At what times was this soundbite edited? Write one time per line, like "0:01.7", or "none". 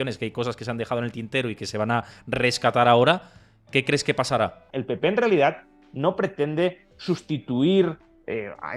0:04.7